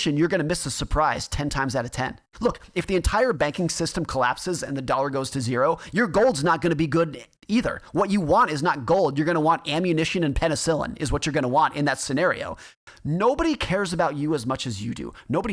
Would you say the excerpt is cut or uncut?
cut